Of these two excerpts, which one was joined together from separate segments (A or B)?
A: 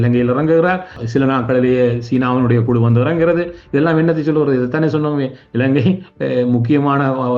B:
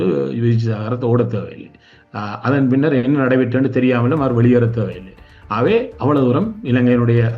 A